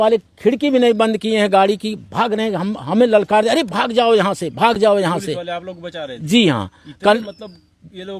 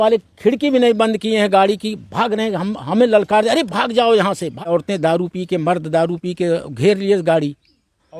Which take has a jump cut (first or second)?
second